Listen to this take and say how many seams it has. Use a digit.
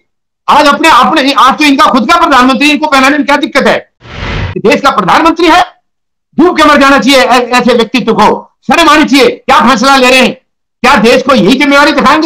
1